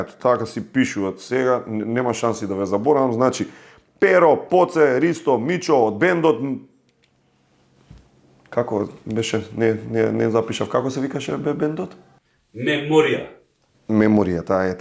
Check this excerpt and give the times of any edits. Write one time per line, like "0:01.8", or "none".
0:13.6

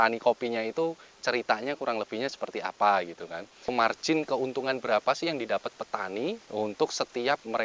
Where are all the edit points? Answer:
0:03.6

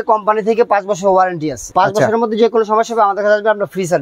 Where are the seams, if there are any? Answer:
0:01.6

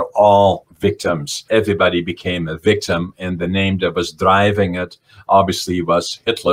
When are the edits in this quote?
0:01.3

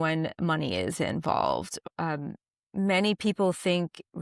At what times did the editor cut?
0:01.8

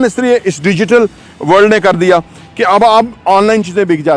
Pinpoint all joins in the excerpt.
none

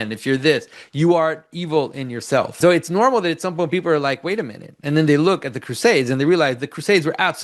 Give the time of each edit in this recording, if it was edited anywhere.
0:02.5

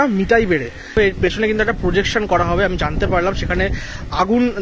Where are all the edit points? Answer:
0:00.9

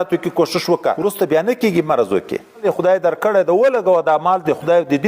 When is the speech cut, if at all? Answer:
0:01.0
0:02.6

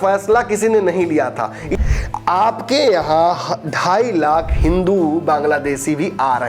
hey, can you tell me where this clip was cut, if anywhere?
0:01.7

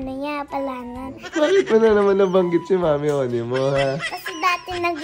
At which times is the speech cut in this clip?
0:01.2
0:04.0

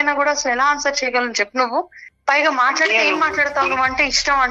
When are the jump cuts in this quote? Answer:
none

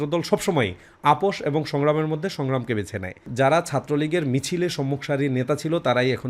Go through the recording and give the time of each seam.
0:03.3

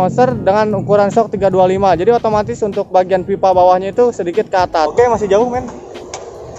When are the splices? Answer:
0:04.9

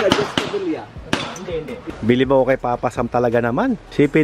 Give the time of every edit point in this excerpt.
0:01.8

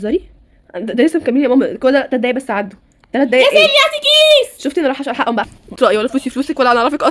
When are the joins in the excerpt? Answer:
none

